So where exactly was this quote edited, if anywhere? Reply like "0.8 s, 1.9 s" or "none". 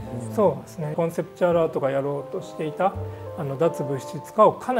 0.9 s

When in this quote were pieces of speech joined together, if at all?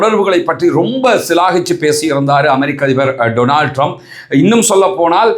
none

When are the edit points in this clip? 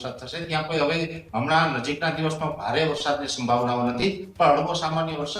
none

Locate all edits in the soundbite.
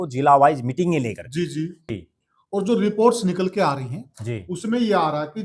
1.9 s

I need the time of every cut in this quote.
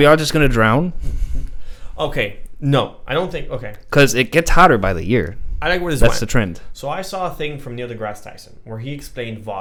none

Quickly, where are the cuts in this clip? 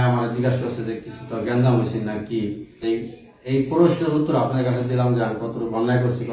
2.7 s

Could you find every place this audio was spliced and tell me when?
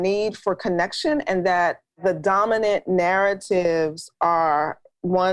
2.0 s

